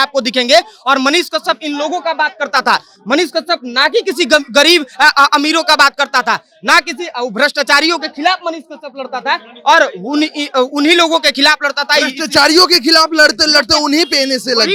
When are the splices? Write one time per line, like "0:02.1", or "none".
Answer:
none